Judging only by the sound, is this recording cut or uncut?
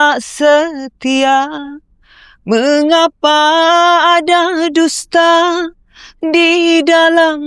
uncut